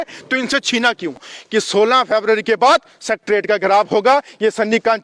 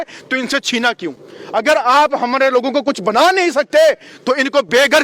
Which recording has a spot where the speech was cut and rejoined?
first; 1 cut; at 1.3 s

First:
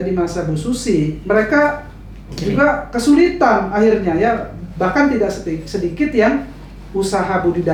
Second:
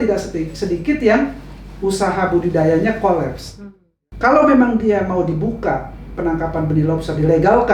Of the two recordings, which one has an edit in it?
second; 1 cut; at 4.0 s

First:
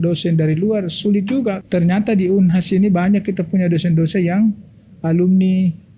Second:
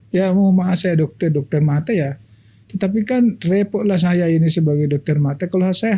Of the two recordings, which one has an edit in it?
first; 1 cut; at 1.6 s

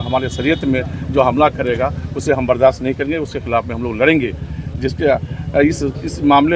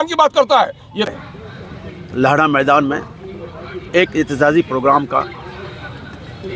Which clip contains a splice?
second; 1 cut; at 1.0 s

